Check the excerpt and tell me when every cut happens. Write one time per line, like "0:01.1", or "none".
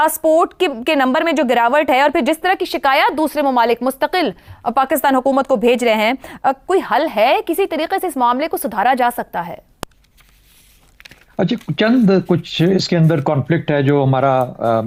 none